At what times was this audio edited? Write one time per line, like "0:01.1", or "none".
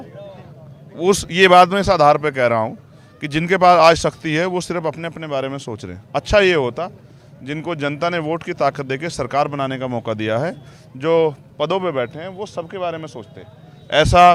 none